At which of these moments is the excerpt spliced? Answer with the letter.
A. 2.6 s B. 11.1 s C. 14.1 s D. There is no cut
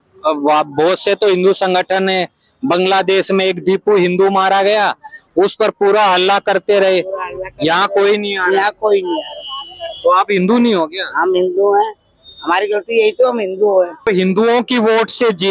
C